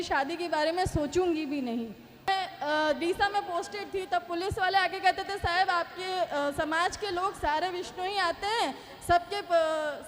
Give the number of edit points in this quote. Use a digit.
1